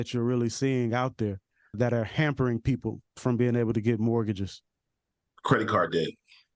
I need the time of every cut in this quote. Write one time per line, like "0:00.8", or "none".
0:01.7